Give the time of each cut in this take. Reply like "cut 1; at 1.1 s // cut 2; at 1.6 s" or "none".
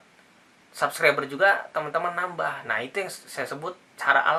none